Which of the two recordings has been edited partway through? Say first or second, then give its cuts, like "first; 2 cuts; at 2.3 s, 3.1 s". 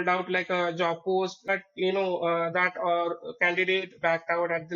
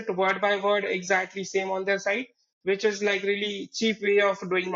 first; 1 cut; at 1.5 s